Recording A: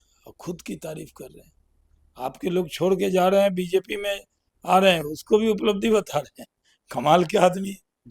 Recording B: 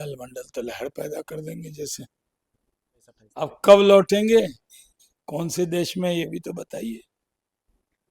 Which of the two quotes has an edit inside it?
B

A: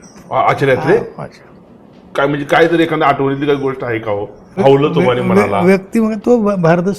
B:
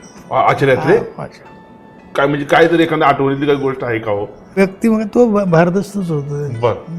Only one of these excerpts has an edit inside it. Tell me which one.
B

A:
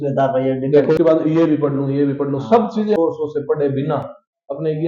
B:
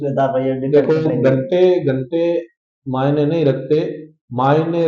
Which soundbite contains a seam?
A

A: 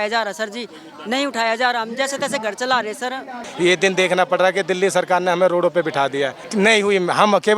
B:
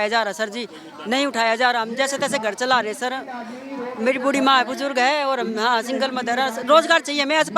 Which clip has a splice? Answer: A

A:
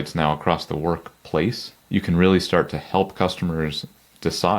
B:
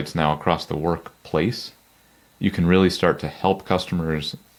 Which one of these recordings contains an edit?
A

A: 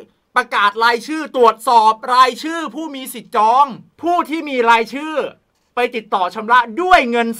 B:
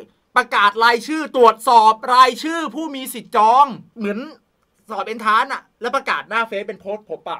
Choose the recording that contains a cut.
A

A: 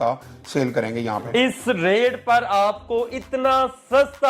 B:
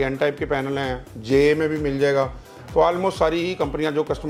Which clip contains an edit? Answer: A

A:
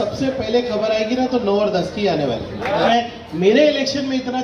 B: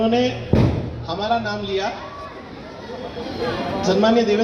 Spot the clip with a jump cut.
A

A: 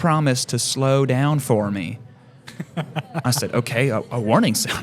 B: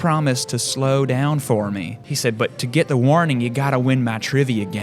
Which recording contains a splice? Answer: B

